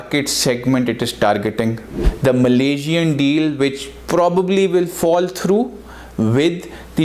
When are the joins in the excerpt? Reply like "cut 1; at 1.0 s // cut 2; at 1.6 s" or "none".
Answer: cut 1; at 2.0 s